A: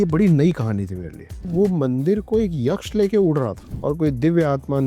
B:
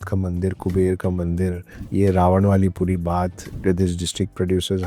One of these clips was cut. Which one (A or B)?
A